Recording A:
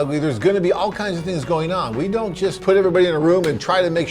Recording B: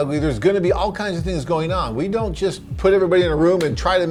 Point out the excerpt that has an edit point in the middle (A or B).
A